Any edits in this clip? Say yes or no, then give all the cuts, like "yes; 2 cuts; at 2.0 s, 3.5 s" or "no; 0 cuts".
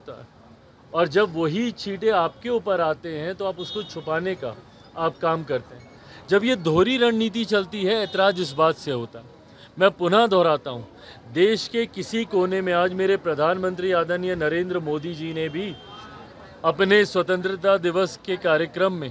no; 0 cuts